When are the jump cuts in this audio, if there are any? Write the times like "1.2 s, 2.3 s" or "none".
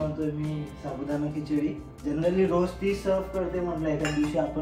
1.9 s